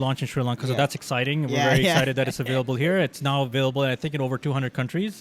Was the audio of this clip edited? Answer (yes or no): no